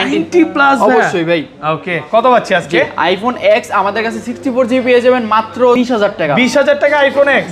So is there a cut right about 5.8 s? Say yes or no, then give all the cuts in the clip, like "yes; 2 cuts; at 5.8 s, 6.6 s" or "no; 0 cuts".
yes; 1 cut; at 5.8 s